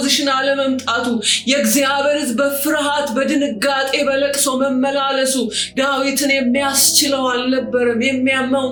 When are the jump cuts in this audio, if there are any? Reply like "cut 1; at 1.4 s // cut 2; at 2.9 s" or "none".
none